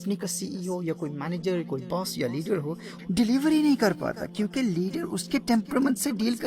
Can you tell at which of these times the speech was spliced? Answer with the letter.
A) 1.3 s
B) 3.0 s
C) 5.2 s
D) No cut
B